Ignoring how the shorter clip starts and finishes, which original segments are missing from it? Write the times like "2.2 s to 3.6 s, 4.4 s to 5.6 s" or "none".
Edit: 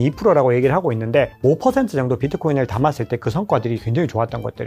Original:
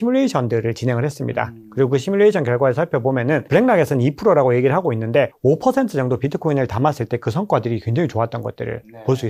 none

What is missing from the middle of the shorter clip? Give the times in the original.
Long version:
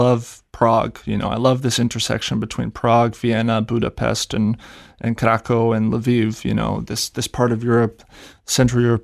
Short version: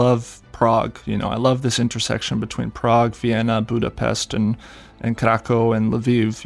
none

